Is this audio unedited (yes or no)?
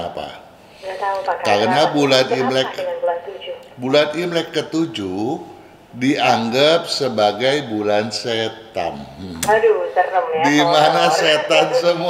yes